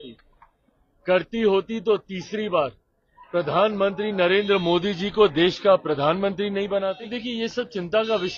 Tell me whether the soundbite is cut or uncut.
cut